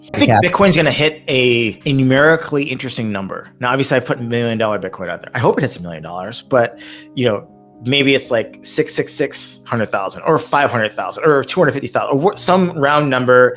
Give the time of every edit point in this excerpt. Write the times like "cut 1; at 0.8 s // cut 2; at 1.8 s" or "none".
cut 1; at 1.8 s